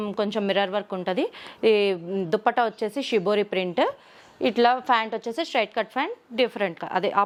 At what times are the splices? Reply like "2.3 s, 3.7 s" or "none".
none